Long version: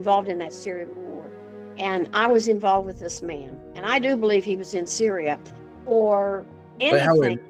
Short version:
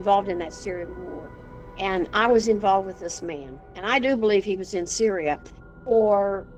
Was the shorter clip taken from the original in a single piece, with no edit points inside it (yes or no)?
yes